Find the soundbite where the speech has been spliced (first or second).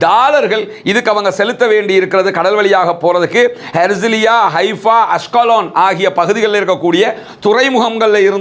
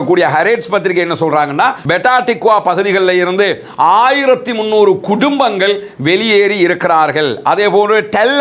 second